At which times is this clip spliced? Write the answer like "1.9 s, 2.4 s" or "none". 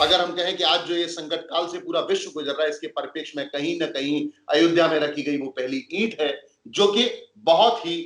none